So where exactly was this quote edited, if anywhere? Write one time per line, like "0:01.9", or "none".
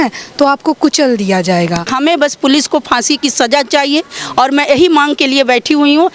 0:01.9